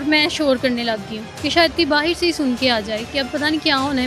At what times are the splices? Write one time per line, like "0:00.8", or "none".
none